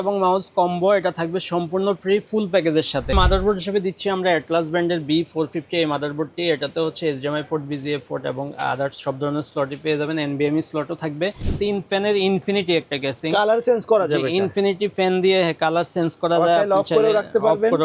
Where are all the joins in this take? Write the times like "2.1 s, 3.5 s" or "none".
3.1 s, 11.5 s